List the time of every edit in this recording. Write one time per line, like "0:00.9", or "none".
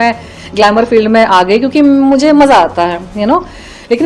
none